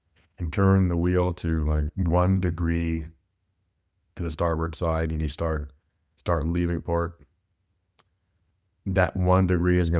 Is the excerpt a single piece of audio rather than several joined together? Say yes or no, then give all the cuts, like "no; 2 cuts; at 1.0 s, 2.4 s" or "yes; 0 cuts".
no; 1 cut; at 1.8 s